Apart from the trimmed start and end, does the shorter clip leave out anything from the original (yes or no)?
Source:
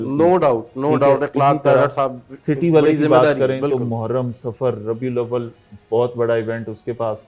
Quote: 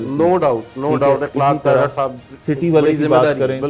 no